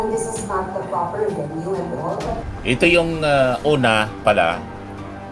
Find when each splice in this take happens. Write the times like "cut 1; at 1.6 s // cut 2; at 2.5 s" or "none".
cut 1; at 2.6 s

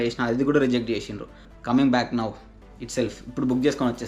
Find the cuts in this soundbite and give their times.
cut 1; at 1.5 s

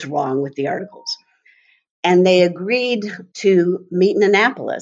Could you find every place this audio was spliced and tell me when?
none

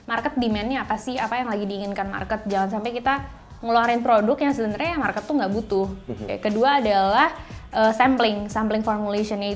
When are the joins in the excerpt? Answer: cut 1; at 6.4 s

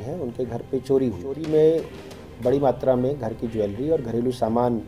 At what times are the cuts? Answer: cut 1; at 1.4 s

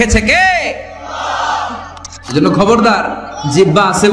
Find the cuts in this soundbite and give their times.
cut 1; at 2.1 s

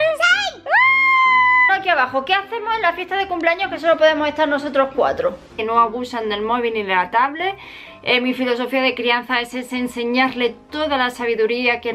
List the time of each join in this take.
cut 1; at 1.7 s // cut 2; at 5.5 s

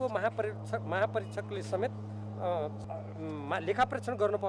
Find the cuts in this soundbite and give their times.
cut 1; at 2.8 s

